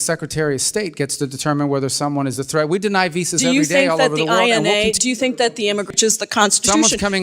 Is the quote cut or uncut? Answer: cut